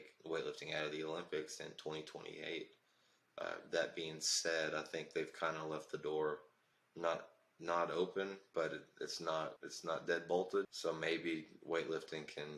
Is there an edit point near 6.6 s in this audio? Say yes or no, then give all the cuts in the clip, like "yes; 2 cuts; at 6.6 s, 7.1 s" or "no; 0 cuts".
no; 2 cuts; at 9.7 s, 10.7 s